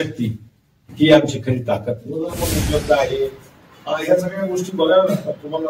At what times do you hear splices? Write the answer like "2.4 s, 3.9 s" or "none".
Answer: 2.4 s